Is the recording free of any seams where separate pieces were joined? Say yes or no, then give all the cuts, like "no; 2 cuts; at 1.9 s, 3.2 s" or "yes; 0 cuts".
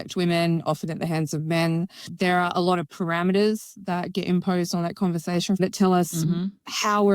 no; 1 cut; at 5.6 s